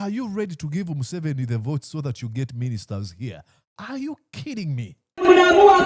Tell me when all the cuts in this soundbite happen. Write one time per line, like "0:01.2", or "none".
none

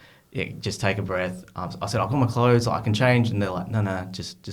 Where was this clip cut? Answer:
none

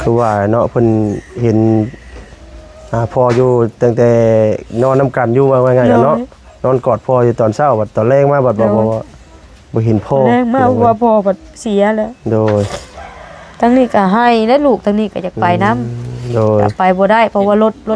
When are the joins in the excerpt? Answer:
none

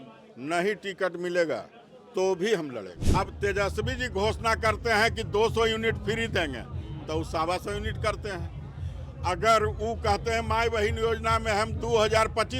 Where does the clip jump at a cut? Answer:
0:02.9

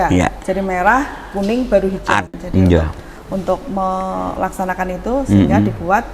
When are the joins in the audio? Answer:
0:02.3

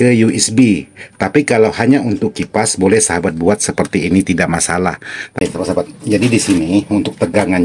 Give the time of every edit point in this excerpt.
0:05.4

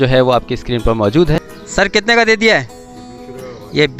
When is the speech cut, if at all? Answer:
0:01.3

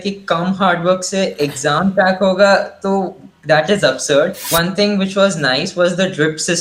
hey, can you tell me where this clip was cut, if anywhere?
0:04.5

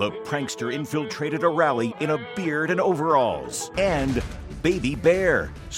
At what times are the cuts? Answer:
0:03.6

